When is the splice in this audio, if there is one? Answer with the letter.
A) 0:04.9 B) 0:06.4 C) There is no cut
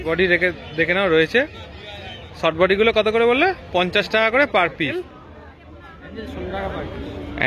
A